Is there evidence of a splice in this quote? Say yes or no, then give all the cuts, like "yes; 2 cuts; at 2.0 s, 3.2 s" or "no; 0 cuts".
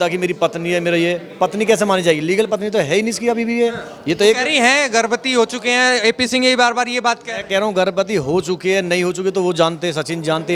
no; 0 cuts